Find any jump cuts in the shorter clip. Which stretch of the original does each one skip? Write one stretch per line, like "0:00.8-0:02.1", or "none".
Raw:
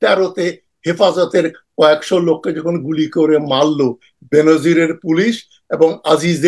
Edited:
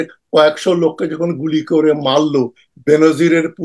none